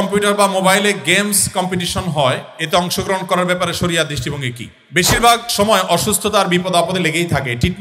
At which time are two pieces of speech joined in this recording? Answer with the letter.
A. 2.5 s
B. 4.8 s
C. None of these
B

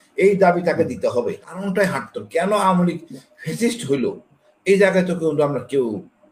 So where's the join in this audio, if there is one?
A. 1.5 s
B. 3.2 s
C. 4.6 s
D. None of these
A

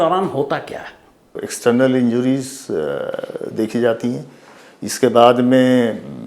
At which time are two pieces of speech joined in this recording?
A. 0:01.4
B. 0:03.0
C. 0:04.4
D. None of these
A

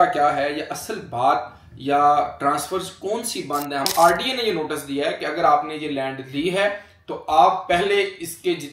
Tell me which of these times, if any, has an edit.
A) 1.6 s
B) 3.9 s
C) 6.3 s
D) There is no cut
B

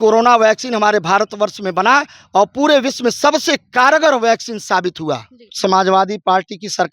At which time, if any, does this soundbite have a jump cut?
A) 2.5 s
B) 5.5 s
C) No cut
B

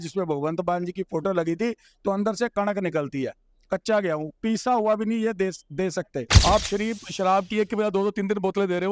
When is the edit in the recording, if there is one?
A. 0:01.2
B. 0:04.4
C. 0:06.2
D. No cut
C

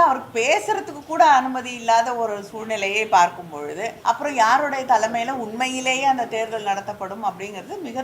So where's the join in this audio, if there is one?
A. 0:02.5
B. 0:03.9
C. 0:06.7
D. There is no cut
B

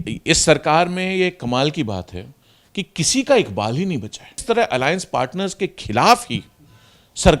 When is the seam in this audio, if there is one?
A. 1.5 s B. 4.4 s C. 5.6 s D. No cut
B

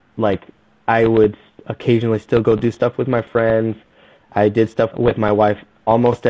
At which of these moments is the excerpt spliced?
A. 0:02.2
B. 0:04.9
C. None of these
B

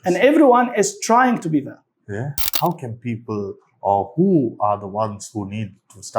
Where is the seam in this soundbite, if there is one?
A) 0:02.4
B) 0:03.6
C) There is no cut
A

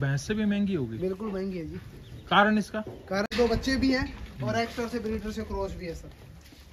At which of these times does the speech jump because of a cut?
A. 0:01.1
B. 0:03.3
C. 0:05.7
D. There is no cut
B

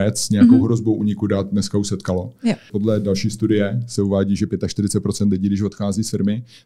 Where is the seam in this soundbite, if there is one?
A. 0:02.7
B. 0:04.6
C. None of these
A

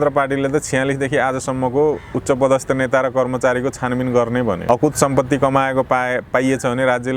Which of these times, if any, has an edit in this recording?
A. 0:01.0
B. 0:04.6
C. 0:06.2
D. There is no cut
B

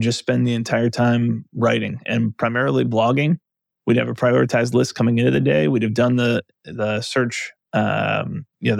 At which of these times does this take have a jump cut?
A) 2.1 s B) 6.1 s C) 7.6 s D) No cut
D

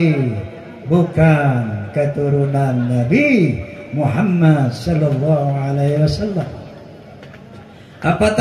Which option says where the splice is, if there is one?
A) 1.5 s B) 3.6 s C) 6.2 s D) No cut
D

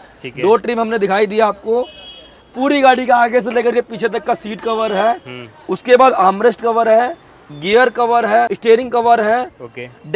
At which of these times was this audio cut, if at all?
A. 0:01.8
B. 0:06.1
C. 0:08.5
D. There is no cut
C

